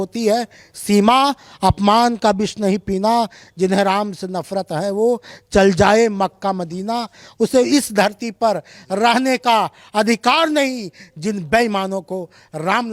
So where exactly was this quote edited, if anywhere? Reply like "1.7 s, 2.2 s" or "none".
none